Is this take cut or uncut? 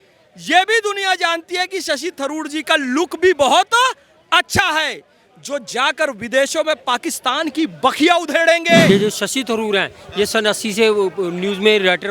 cut